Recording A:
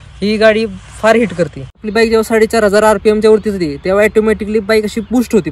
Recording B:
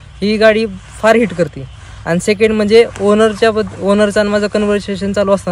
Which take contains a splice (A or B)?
A